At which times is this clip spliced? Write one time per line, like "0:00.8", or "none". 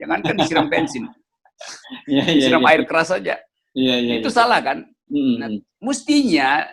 none